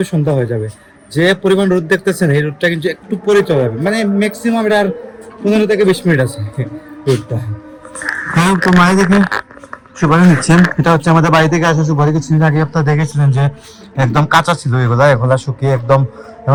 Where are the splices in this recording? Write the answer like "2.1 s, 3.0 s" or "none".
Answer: none